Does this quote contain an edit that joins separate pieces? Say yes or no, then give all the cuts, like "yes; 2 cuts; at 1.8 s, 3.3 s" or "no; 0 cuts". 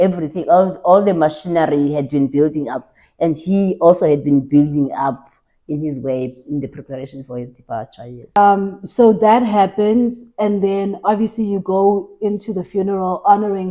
yes; 1 cut; at 8.4 s